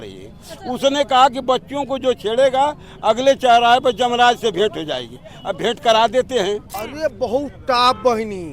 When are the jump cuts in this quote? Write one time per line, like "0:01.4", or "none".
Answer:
0:06.8